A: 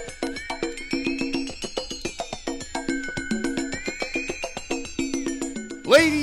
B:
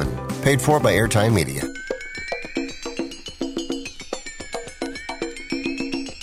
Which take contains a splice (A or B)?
B